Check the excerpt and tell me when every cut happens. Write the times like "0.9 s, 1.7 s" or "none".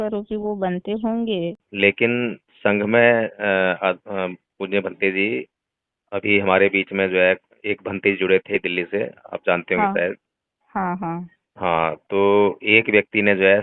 1.7 s, 8.6 s